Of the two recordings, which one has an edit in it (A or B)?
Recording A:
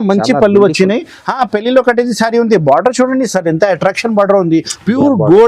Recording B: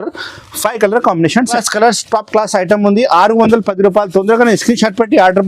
B